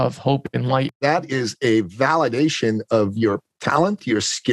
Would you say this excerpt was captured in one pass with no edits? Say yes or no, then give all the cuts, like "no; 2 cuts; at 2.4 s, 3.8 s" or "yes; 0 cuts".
no; 1 cut; at 0.9 s